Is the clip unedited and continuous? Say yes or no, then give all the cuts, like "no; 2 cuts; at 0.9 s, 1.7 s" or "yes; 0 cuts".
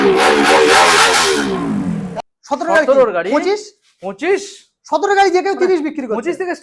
no; 1 cut; at 2.1 s